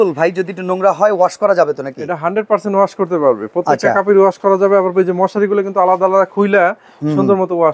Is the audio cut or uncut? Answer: uncut